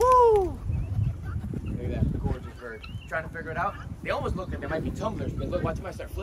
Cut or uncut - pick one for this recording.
uncut